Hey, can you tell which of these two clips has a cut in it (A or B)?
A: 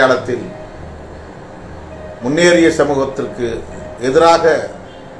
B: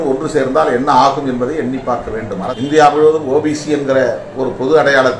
B